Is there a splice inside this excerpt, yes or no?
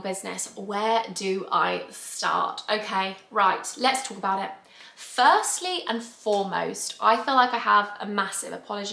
no